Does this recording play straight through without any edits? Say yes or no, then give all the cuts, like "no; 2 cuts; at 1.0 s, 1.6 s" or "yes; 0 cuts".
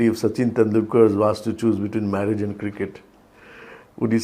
yes; 0 cuts